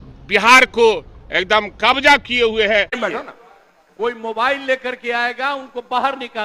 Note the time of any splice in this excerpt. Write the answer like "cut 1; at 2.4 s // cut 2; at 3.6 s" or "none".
cut 1; at 3.0 s

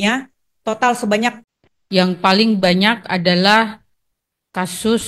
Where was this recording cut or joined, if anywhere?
cut 1; at 1.4 s

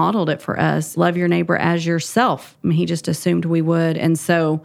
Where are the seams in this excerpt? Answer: cut 1; at 0.9 s

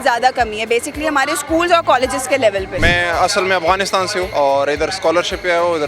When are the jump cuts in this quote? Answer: cut 1; at 2.7 s // cut 2; at 4.3 s

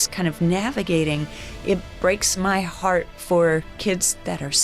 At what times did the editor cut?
none

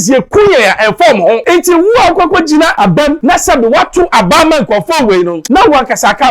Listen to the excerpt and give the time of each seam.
cut 1; at 1.4 s // cut 2; at 3.0 s // cut 3; at 5.4 s

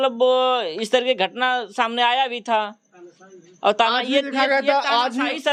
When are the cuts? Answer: none

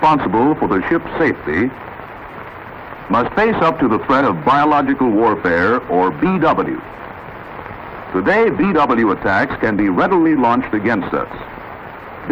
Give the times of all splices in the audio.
cut 1; at 10.2 s

